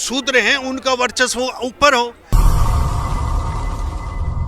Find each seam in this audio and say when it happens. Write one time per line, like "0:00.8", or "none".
0:02.3